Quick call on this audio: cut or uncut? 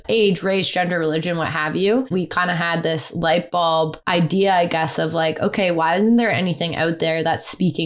cut